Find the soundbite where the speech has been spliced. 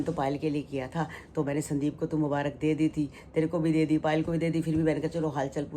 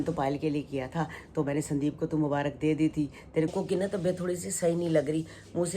second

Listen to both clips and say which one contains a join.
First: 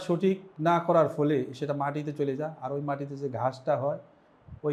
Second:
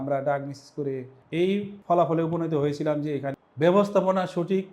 second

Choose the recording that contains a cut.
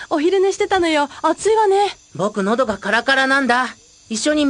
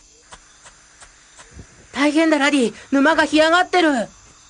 second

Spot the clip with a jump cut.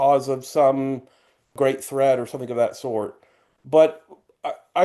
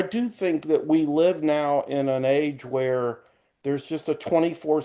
first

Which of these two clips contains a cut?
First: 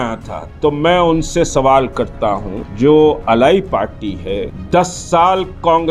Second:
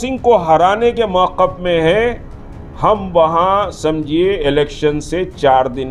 first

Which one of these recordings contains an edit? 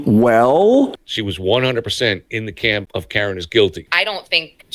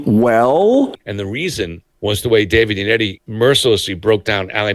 first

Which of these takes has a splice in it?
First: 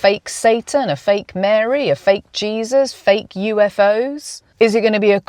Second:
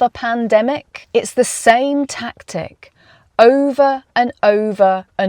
second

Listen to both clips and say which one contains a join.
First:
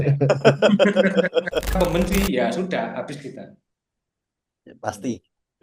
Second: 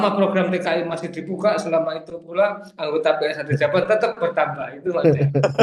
first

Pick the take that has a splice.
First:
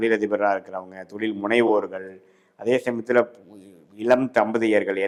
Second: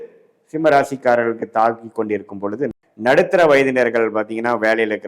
second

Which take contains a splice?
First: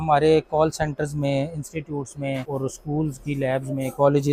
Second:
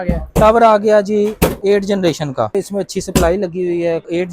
second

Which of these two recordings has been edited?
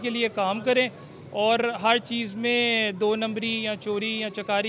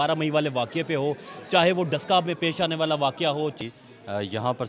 second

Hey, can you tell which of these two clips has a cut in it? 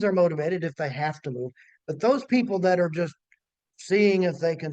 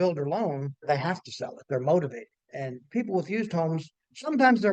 second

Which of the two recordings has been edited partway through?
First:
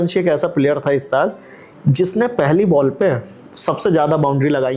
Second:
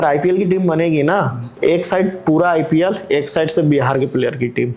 second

